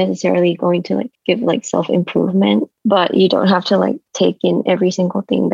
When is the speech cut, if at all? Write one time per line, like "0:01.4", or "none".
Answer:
0:01.1
0:02.7